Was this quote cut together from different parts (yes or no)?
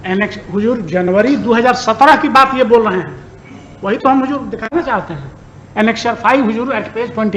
no